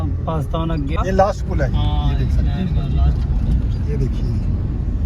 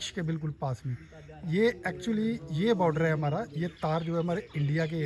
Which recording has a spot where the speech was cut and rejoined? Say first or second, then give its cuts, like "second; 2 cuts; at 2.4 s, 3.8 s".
first; 1 cut; at 1.0 s